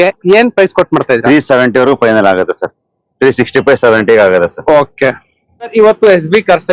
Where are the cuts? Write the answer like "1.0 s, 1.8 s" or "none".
5.7 s